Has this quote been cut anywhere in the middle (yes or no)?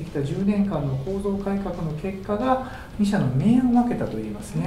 no